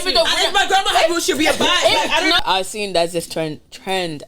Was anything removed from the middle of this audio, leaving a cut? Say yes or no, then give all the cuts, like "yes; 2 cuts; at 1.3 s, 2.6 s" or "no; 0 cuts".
yes; 1 cut; at 2.4 s